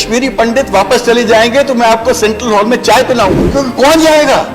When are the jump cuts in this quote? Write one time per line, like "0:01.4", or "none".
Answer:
0:03.4